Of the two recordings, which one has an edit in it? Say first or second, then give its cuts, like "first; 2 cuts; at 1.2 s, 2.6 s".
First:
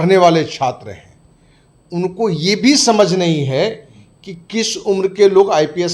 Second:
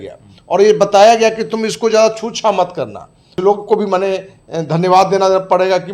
second; 1 cut; at 3.3 s